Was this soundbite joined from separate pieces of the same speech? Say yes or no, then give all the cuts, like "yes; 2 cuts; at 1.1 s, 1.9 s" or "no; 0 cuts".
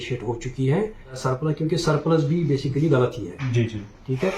yes; 1 cut; at 1.2 s